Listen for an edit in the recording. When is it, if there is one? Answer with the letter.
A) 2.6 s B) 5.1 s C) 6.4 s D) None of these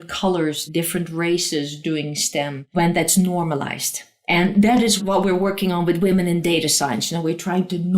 A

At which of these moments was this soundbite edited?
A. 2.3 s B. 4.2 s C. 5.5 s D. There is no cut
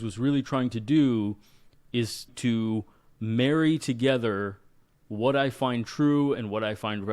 A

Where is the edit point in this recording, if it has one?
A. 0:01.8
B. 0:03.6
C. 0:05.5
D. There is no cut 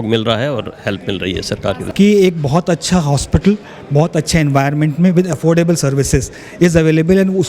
A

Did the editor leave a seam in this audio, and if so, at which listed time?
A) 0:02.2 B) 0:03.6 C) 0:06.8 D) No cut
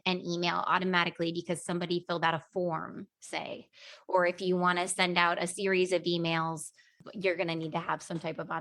D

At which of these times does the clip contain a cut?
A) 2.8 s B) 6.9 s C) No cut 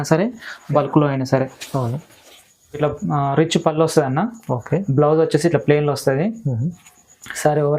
A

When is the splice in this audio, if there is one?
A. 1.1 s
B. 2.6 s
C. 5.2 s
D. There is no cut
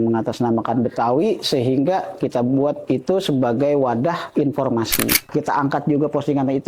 C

